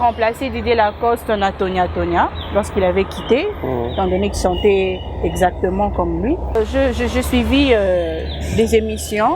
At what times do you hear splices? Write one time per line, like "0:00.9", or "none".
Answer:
0:06.6